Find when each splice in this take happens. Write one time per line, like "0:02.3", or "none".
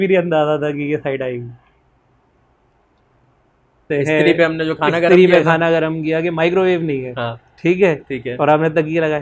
0:03.8